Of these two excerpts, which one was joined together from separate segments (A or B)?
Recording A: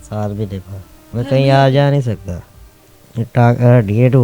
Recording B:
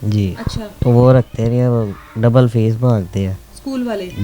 A